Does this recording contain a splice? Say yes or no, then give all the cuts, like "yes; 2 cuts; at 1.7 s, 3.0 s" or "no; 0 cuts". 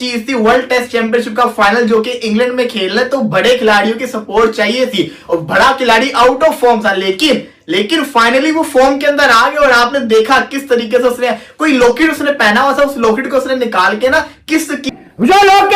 yes; 1 cut; at 14.9 s